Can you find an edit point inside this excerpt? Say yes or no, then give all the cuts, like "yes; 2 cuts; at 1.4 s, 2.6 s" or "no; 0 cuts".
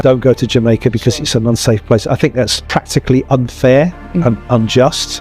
no; 0 cuts